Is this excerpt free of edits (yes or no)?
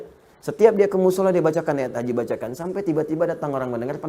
yes